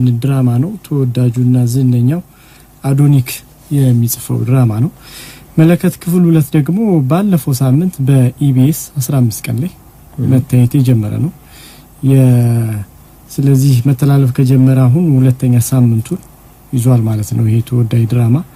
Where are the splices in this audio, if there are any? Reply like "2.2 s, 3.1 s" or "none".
none